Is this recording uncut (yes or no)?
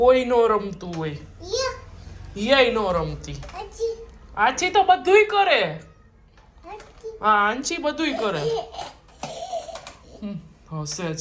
yes